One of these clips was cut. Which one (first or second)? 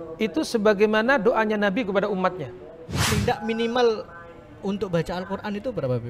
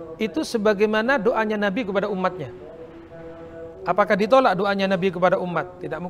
first